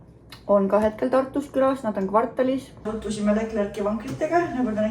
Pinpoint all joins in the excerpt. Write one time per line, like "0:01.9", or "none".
0:02.9